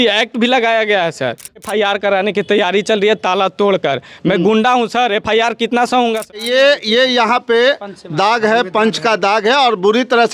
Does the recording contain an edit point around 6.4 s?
yes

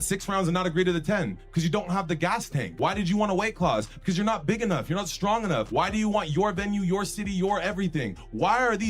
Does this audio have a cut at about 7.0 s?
no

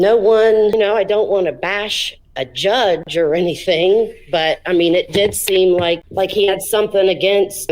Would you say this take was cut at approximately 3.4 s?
no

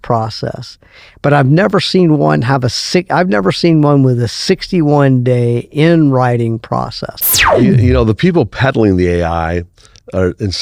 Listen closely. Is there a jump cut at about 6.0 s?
no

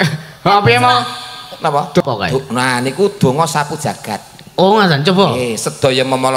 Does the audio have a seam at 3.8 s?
no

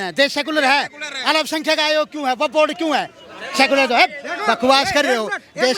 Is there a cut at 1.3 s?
no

